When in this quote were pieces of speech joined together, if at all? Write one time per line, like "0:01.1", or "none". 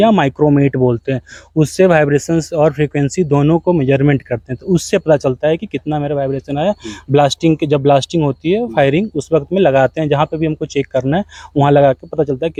none